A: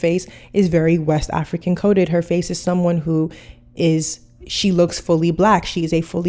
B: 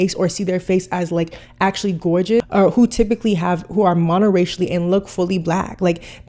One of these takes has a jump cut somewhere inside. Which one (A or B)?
B